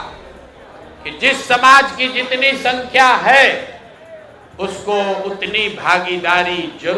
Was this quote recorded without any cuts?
yes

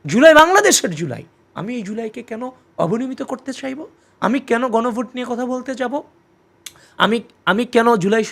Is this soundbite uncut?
yes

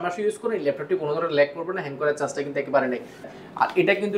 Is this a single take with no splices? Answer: no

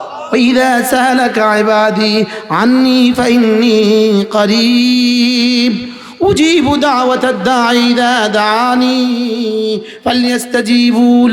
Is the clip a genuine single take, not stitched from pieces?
yes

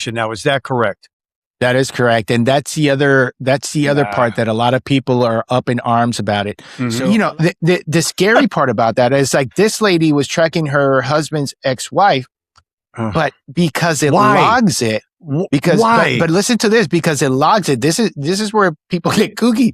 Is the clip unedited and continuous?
no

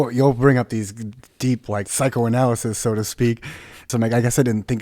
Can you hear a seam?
yes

